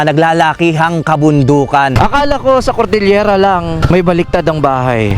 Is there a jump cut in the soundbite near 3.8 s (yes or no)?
yes